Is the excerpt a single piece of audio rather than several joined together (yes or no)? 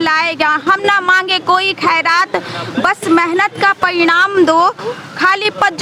yes